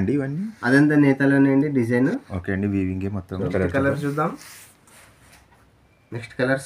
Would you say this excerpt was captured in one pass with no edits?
no; 1 cut; at 3.5 s

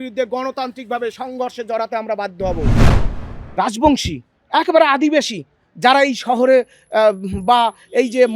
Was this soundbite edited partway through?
yes; 1 cut; at 2.9 s

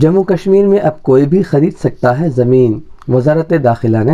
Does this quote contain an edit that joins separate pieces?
no; 0 cuts

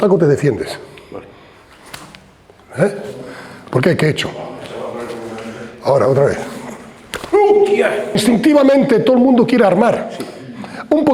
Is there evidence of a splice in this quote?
yes; 1 cut; at 8.2 s

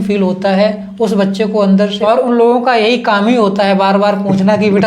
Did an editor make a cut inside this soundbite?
yes; 1 cut; at 2.0 s

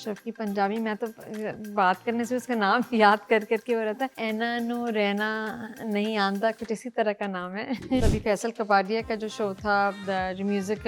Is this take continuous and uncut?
no; 2 cuts; at 4.2 s, 8.1 s

